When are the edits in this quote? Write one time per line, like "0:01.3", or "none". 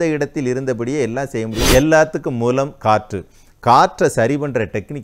0:01.6